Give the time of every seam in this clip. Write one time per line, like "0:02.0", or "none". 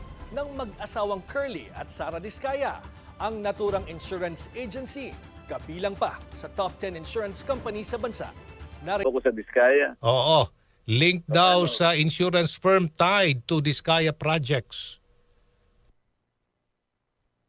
0:09.1